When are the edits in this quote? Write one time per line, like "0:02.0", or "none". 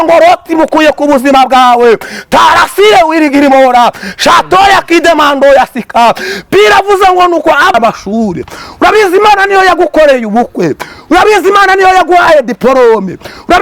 0:07.7